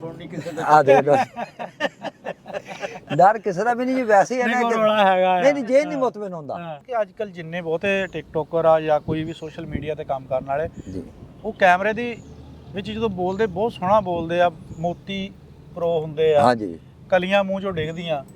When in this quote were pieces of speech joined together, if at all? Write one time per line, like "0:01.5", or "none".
0:06.8